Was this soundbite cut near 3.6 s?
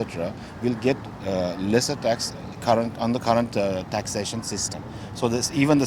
no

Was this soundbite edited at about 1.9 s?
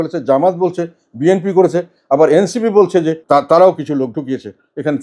no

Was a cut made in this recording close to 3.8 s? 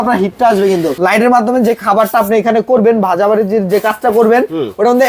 no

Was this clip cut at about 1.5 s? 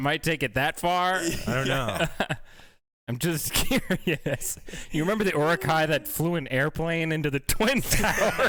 no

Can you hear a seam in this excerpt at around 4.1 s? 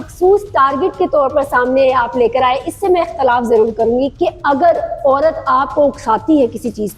yes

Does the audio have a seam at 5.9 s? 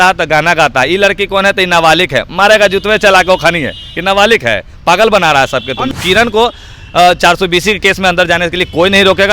yes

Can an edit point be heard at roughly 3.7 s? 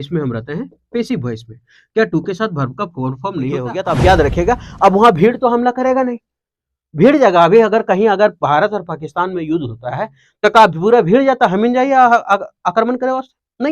yes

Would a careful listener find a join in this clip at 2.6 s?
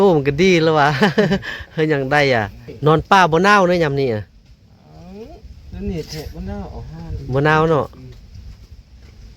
yes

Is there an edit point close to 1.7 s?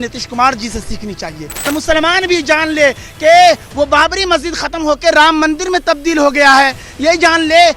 yes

